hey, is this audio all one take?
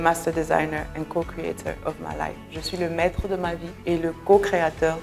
no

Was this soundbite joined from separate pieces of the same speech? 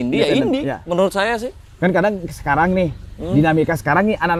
no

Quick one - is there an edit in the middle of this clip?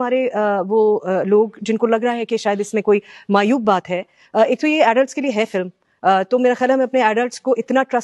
no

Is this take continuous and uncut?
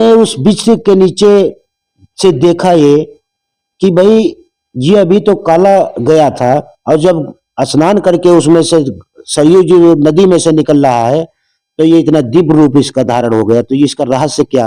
yes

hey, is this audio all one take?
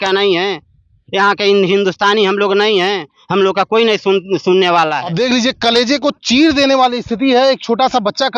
no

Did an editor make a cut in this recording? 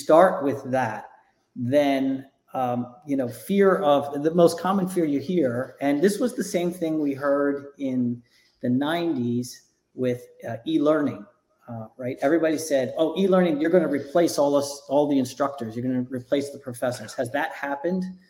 no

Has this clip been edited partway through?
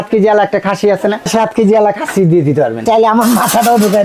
yes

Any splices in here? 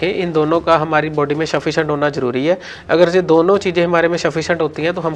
no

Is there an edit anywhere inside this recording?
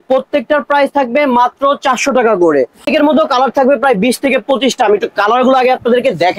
yes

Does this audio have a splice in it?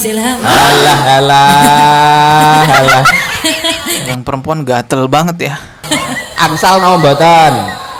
no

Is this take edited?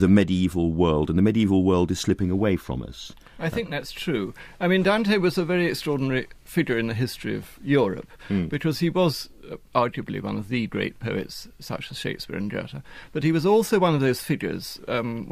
no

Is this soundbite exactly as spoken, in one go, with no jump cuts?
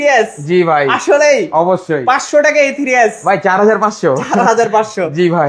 yes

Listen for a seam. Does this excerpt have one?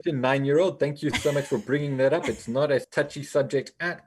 yes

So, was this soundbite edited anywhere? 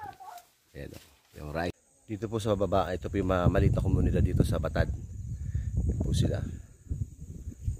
yes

